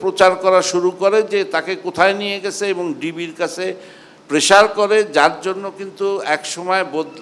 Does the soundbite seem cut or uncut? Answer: uncut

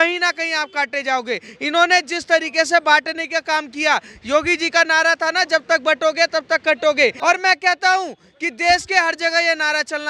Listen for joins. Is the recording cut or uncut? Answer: uncut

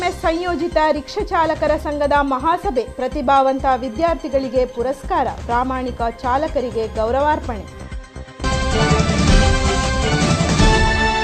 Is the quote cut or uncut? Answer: cut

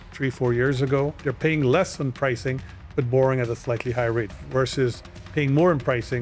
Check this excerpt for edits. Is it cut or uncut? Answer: cut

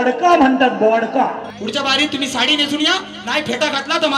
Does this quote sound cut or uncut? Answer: cut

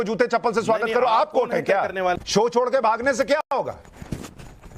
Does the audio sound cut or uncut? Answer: cut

